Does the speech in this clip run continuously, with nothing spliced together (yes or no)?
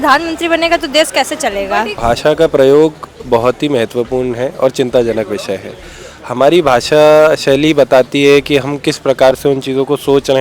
no